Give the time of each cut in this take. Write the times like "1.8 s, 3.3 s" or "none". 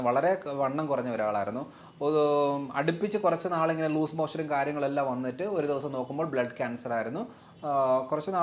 none